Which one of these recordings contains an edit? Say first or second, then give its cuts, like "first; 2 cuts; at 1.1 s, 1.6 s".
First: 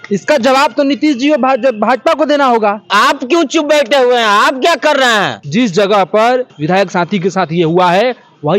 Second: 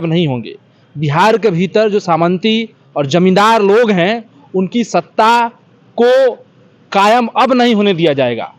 first; 3 cuts; at 2.9 s, 5.4 s, 6.6 s